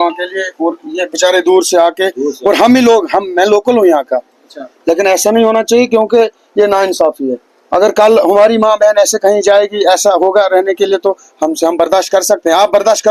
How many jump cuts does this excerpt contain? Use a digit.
0